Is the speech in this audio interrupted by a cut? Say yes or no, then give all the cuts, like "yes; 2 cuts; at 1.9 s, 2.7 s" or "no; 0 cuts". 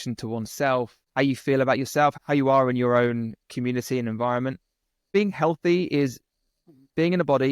yes; 3 cuts; at 1.0 s, 2.2 s, 5.1 s